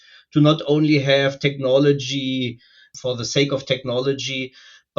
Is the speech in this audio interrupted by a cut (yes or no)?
yes